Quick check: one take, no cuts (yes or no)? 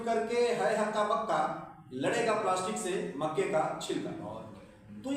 yes